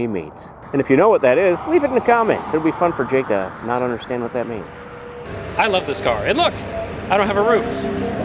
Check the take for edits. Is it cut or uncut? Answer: cut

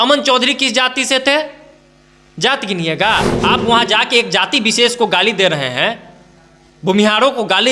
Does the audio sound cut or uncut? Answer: cut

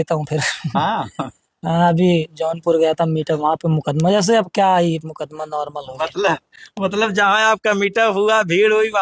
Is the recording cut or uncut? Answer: uncut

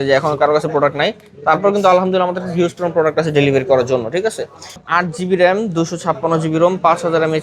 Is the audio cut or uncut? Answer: cut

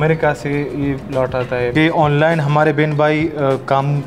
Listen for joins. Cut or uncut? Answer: cut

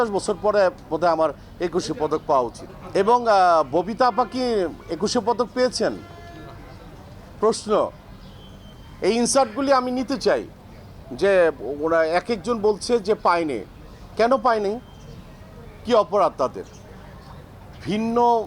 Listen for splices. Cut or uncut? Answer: uncut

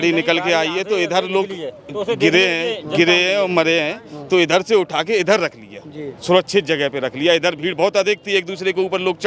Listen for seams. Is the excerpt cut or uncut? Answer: uncut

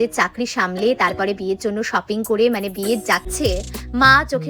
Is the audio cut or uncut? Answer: cut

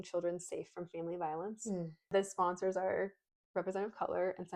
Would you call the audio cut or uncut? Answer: cut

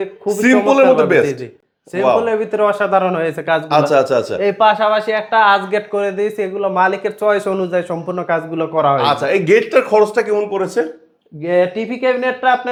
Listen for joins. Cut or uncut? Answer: uncut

